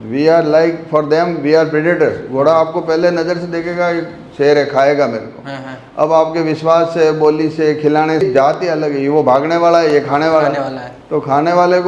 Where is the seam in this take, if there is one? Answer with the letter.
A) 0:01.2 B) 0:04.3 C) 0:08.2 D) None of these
C